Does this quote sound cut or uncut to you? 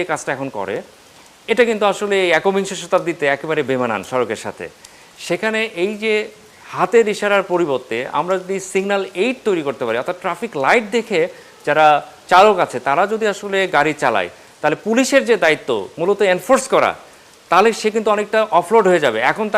uncut